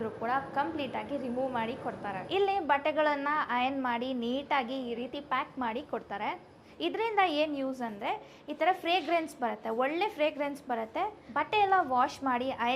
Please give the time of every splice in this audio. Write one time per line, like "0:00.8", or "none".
0:02.2
0:06.6
0:11.2